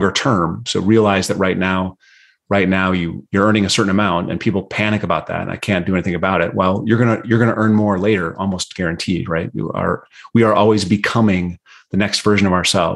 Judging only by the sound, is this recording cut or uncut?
uncut